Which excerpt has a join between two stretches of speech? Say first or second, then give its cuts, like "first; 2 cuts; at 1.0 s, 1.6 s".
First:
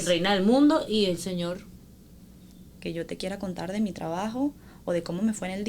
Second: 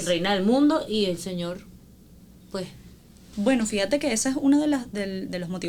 first; 1 cut; at 2.3 s